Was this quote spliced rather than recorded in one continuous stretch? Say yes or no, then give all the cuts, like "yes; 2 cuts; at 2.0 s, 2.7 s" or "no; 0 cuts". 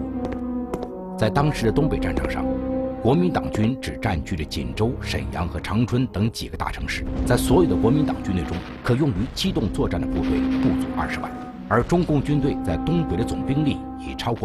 no; 0 cuts